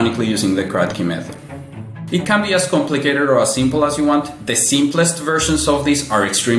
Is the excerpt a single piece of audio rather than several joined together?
no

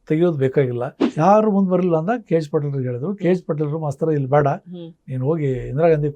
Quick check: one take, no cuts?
no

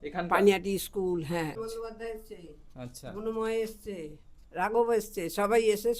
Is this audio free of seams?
no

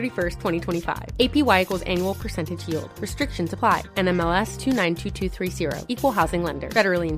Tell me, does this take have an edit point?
no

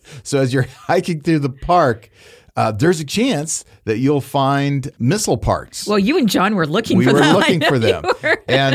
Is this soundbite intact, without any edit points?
yes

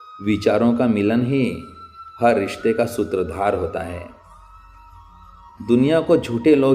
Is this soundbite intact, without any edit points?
no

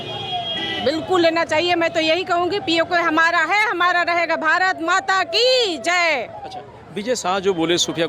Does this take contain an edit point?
no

